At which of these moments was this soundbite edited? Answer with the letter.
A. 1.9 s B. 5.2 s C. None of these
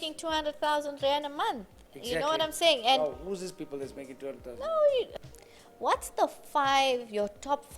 B